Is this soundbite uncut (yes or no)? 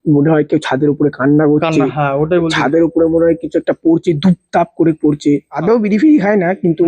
no